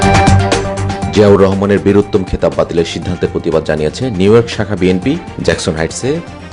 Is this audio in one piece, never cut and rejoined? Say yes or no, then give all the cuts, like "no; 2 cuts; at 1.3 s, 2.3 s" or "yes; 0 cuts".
no; 1 cut; at 0.9 s